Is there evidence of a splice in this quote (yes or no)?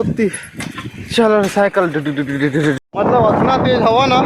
yes